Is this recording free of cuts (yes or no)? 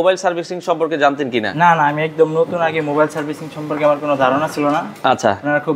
yes